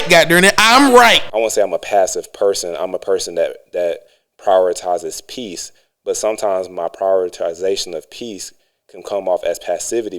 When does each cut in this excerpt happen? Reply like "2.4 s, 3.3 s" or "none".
1.3 s